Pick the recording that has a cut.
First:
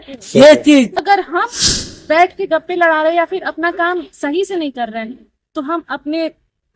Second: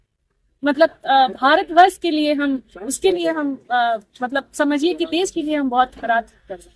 first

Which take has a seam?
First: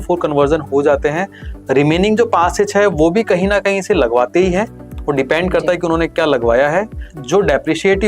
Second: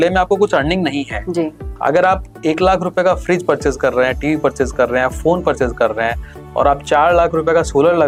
first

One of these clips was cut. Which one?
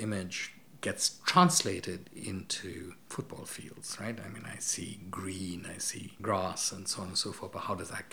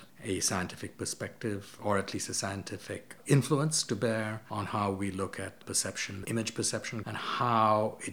second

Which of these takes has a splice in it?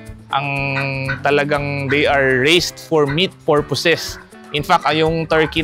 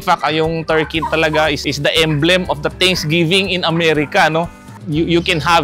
second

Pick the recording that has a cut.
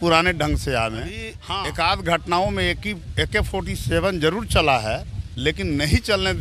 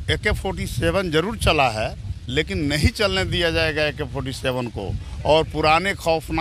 first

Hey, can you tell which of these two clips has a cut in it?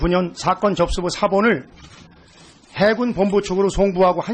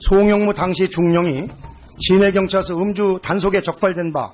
second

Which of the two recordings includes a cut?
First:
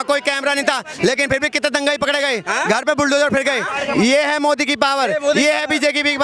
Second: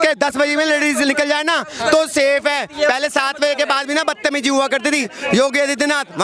second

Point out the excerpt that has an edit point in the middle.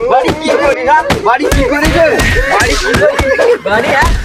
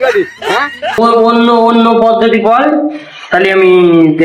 second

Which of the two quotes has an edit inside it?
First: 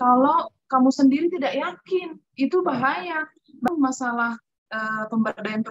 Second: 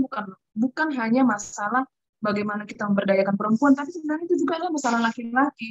first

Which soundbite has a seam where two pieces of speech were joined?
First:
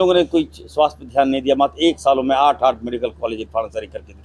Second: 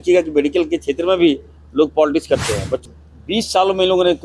second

